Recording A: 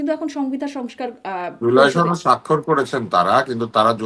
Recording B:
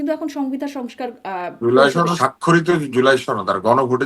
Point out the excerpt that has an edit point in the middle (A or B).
B